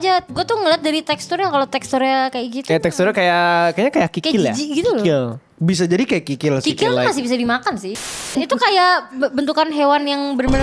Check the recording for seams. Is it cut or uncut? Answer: cut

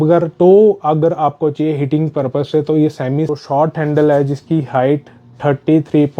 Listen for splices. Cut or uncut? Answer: cut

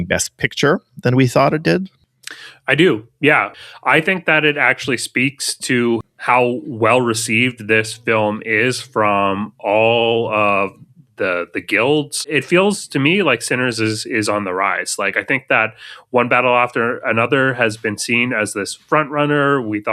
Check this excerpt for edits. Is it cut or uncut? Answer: cut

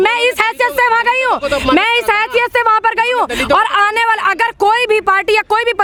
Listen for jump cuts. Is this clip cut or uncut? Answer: uncut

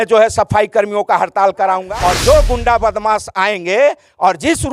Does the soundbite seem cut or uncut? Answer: cut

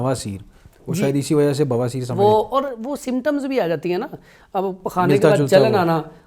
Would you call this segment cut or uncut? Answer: uncut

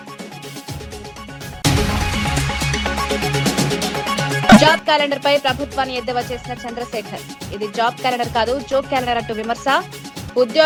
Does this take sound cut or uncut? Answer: uncut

